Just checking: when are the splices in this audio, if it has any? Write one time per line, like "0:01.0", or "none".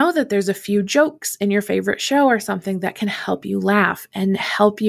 none